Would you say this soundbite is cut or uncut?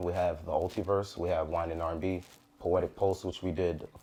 uncut